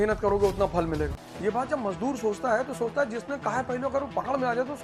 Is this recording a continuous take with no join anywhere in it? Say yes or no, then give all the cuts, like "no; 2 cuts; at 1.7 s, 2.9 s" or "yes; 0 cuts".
yes; 0 cuts